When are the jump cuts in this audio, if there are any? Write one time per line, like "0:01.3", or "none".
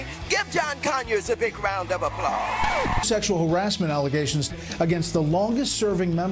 none